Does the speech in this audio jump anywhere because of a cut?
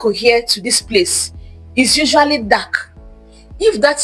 no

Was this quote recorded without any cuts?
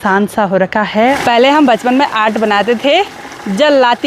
no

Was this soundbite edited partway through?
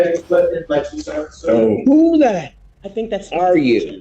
no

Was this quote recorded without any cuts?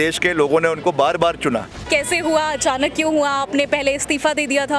no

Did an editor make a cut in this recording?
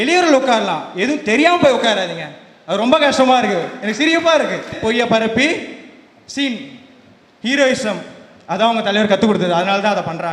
yes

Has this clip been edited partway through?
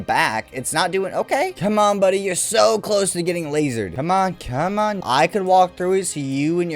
yes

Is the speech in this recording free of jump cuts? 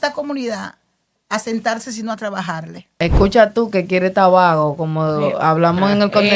no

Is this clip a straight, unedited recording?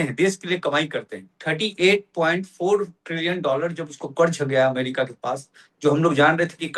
no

